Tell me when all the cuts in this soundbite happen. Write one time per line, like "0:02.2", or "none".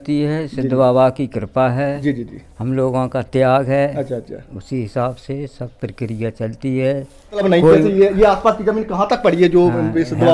none